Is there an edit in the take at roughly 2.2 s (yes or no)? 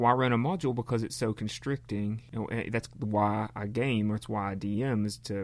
yes